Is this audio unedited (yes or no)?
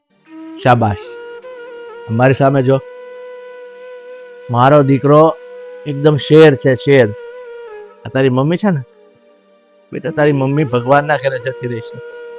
yes